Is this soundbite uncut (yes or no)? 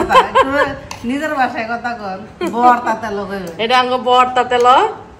yes